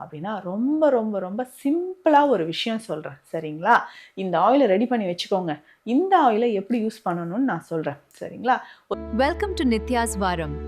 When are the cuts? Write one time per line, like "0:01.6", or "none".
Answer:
0:08.9